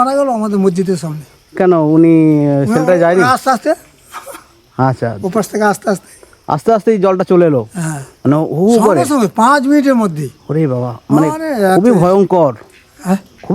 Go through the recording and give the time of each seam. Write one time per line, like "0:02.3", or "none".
none